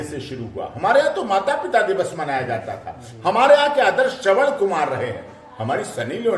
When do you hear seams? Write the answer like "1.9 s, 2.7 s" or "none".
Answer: none